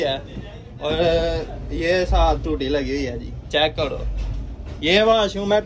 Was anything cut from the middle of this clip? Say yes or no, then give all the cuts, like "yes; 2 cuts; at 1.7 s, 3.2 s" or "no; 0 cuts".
no; 0 cuts